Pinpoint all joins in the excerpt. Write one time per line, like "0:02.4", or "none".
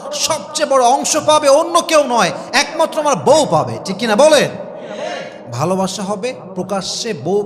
none